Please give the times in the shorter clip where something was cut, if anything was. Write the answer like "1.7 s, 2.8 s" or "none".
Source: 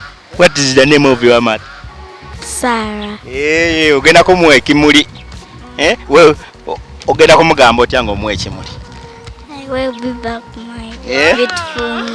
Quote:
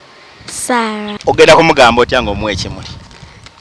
1.1 s

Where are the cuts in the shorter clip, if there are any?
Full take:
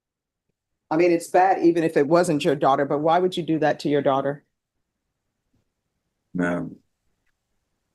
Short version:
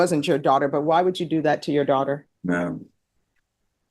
2.3 s

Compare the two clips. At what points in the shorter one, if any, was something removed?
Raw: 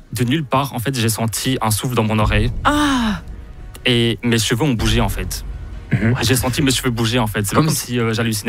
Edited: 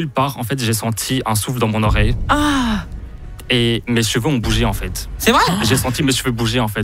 5.5 s

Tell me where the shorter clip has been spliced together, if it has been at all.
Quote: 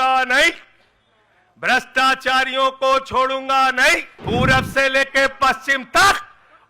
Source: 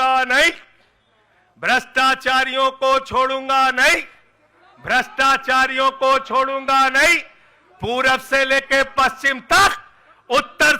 4.1 s

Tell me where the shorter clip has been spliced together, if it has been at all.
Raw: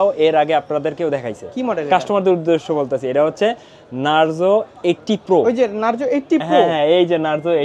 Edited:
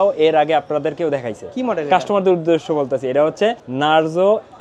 3.7 s

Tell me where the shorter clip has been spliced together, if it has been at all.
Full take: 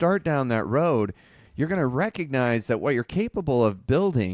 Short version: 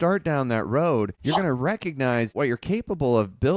1.2 s, 2.3 s

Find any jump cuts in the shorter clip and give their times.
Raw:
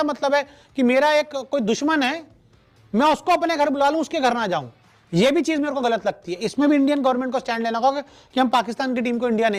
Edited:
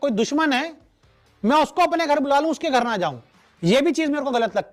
none

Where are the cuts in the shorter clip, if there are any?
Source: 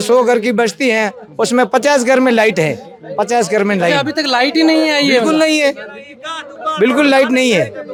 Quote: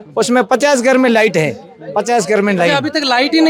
none

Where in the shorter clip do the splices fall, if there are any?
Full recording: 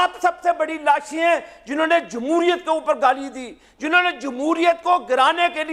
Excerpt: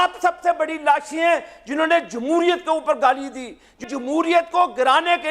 3.8 s

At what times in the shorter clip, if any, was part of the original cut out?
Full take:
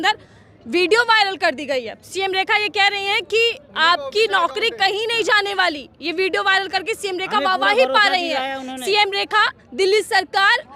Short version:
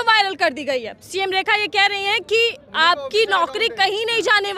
none

